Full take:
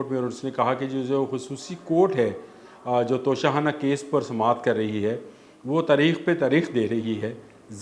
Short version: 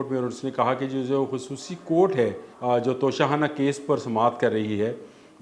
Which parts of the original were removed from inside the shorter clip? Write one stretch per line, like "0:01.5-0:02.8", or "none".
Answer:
0:02.5-0:02.7